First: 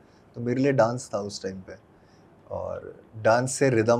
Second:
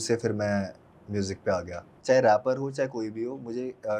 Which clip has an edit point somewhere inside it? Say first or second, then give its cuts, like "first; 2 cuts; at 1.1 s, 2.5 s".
second; 1 cut; at 1.9 s